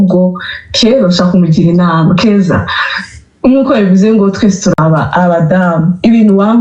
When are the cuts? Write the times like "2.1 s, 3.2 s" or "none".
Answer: none